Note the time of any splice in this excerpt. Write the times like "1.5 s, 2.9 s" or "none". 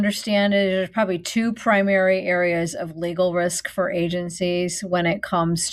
none